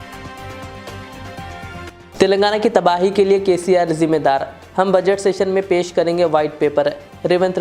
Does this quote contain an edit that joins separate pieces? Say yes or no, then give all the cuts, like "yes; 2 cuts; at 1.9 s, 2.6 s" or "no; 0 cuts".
yes; 1 cut; at 1.9 s